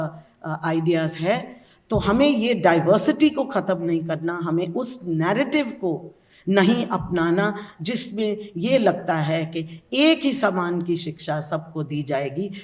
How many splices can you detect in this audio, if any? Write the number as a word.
zero